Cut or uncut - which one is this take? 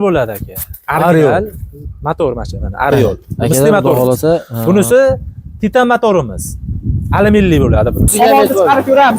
cut